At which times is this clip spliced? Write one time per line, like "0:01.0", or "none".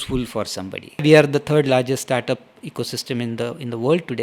0:01.0